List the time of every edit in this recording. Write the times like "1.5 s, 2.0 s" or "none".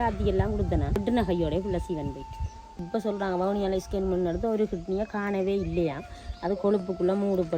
1.0 s, 2.9 s